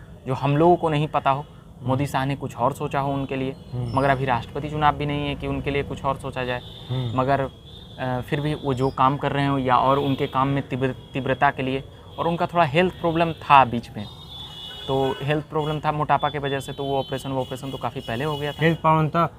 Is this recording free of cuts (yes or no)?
yes